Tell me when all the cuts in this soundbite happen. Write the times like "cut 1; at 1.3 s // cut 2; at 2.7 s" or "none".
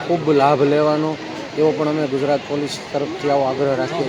none